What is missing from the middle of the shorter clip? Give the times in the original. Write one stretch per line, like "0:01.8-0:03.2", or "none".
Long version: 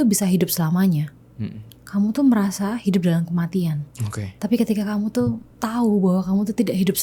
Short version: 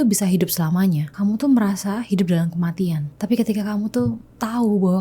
0:01.1-0:01.8
0:03.9-0:04.3